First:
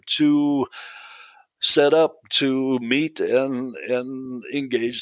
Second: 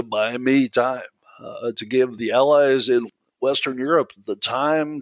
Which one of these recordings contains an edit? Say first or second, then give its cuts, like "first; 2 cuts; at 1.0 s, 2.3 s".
second; 2 cuts; at 2.1 s, 3.1 s